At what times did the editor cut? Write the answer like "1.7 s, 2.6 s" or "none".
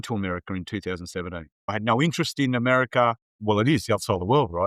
1.7 s, 3.4 s